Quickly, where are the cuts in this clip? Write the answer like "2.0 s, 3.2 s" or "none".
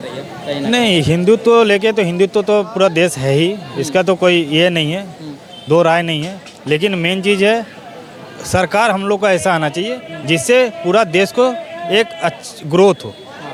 none